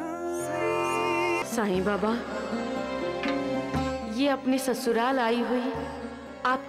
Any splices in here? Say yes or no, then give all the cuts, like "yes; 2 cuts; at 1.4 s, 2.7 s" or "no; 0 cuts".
yes; 1 cut; at 1.4 s